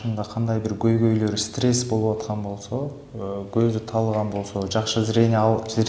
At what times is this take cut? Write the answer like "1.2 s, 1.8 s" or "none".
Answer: none